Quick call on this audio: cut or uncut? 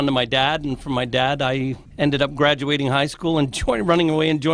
cut